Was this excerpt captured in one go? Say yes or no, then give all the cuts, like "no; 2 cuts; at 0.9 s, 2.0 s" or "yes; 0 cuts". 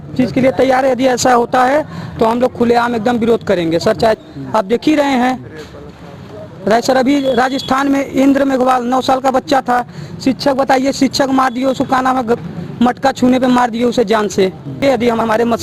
no; 2 cuts; at 4.2 s, 14.8 s